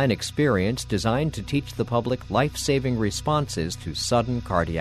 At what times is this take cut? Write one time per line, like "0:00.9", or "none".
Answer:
none